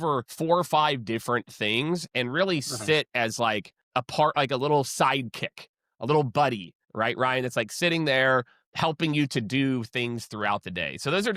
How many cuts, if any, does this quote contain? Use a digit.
0